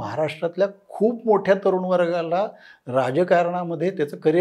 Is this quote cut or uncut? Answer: uncut